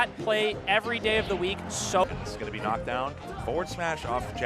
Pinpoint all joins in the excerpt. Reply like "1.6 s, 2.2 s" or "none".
2.0 s